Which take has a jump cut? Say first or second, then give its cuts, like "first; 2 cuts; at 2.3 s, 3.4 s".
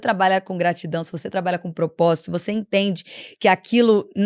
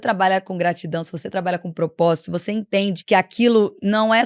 second; 1 cut; at 3.0 s